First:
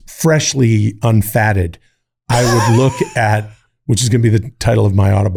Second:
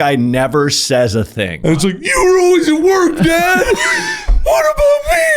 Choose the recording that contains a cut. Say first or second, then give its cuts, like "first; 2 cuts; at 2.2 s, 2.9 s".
second; 1 cut; at 1.5 s